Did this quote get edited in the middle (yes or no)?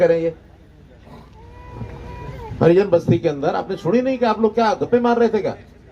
no